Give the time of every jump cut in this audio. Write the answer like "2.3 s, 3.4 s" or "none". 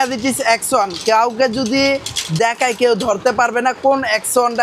none